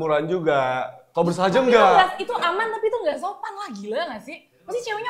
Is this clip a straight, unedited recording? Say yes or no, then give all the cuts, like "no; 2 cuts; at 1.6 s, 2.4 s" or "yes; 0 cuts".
no; 1 cut; at 1.0 s